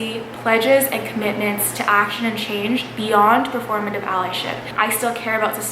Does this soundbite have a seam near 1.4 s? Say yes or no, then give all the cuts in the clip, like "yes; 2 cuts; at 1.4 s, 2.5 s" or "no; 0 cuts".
no; 1 cut; at 4.7 s